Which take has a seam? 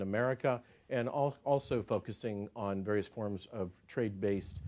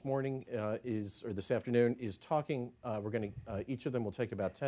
first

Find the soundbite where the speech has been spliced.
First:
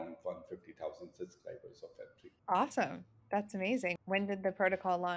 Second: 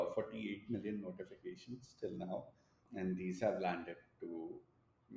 first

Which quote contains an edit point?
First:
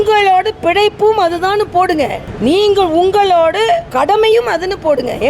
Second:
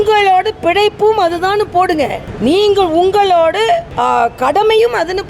first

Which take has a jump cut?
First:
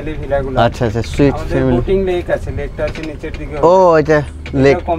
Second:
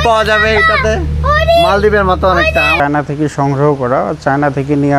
second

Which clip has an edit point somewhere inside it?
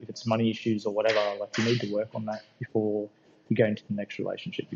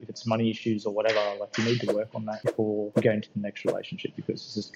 second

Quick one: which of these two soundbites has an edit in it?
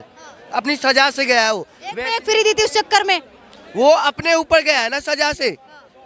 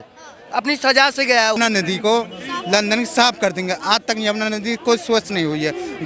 second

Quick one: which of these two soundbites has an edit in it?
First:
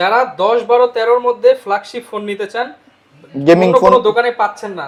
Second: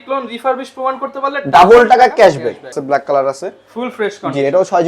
second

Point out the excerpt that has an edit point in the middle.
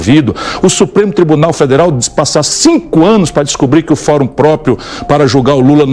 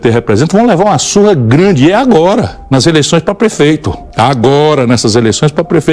second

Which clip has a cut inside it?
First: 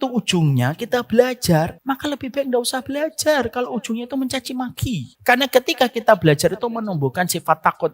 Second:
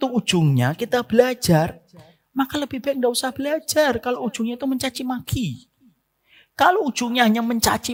first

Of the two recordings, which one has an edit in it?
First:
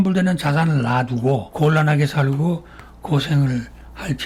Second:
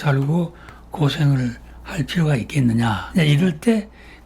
second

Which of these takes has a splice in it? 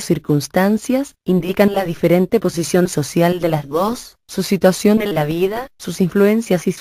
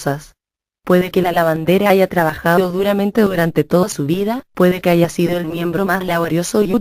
first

